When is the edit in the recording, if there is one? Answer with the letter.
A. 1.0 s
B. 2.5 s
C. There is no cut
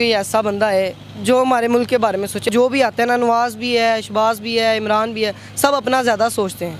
B